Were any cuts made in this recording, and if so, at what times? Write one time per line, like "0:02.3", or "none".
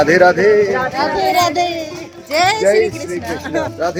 none

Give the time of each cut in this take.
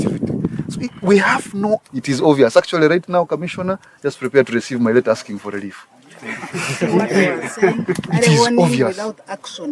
0:01.9

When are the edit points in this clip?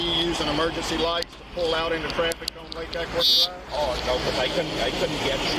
none

